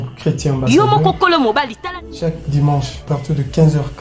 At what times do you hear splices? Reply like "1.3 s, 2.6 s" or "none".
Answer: 1.7 s